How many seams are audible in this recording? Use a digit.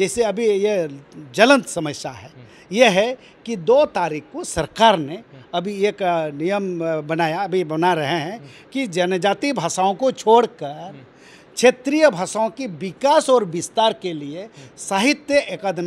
0